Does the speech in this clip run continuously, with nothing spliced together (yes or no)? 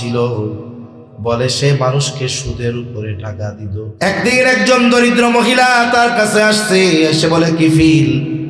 no